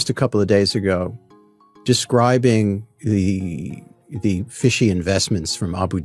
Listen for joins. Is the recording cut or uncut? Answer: uncut